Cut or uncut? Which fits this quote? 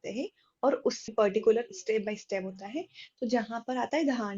cut